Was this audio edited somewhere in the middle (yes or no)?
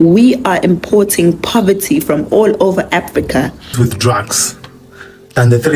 yes